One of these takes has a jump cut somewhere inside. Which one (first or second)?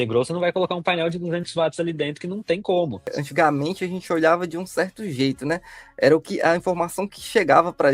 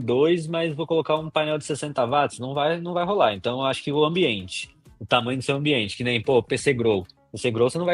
first